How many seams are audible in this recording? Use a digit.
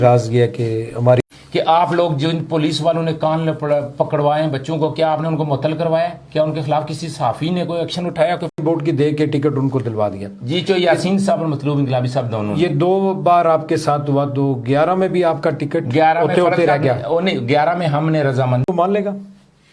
3